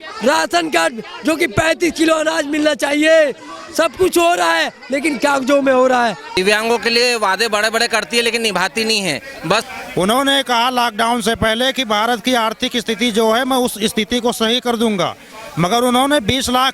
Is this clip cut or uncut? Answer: cut